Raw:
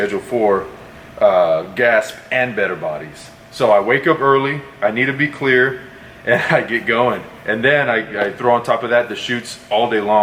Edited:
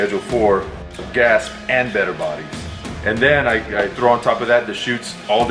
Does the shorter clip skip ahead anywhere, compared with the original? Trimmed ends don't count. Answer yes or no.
yes